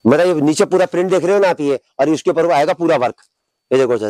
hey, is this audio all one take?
yes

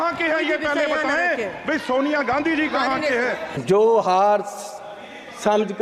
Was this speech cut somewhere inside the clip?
yes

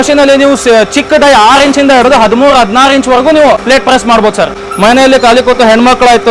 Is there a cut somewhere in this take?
yes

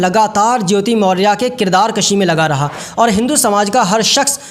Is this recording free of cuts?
no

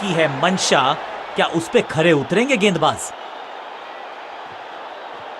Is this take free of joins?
no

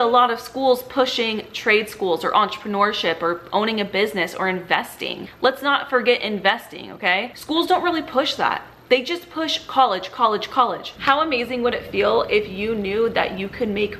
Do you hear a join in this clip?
yes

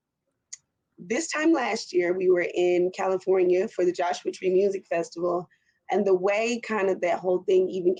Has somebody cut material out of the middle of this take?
no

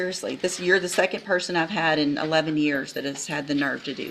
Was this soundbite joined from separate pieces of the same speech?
no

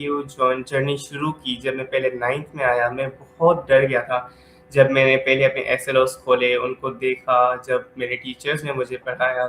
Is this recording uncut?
yes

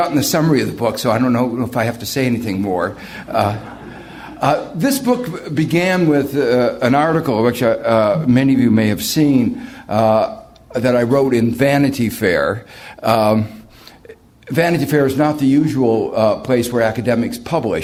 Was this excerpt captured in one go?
yes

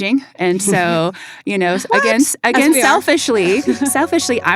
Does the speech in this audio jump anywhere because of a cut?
no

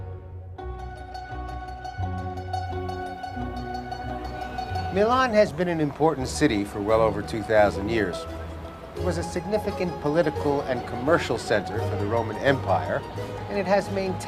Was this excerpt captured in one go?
no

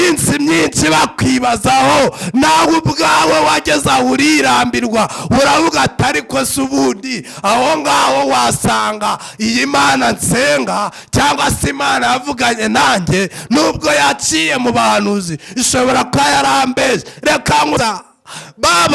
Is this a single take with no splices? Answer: no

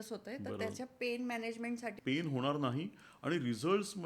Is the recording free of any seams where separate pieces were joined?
no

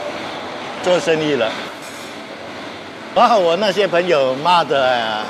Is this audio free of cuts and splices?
yes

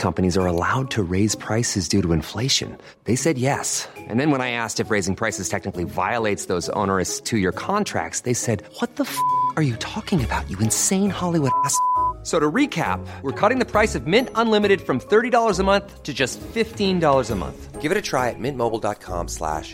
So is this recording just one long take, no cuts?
yes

